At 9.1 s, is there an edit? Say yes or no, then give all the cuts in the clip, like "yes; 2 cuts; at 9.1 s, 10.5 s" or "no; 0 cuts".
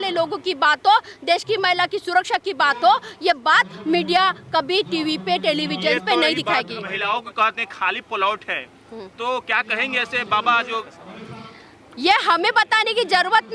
no; 1 cut; at 6.9 s